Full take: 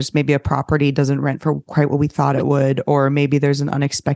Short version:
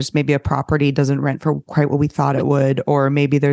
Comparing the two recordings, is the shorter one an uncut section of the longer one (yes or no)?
yes